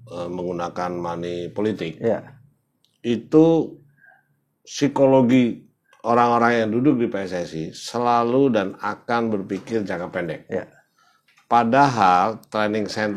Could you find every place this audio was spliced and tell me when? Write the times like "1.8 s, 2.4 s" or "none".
none